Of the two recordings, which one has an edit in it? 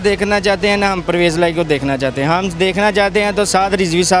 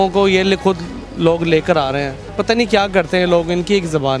second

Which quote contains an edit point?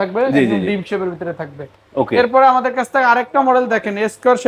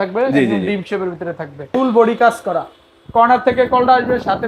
second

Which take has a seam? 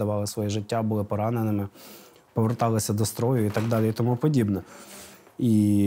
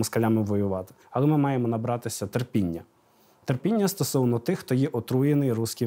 second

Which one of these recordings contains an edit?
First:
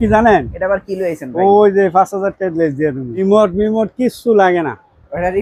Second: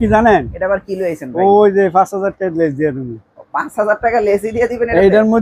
first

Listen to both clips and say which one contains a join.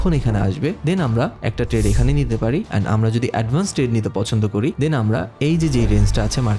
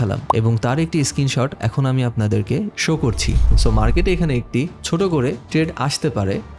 second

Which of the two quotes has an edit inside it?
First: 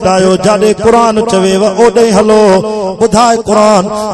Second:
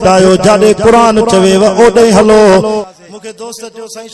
second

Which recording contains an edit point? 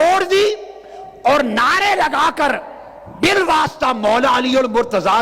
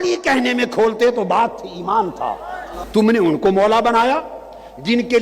second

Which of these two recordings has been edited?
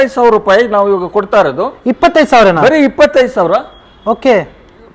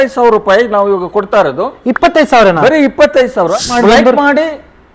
second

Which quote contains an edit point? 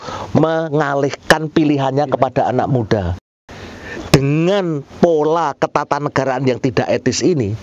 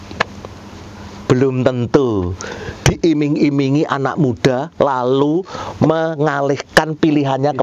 first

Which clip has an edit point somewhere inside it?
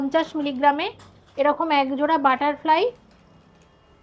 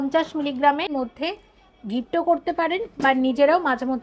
second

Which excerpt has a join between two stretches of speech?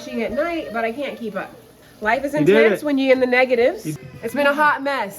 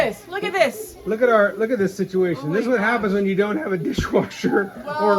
first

